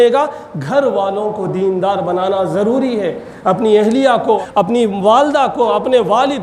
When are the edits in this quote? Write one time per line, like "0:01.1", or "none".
0:04.4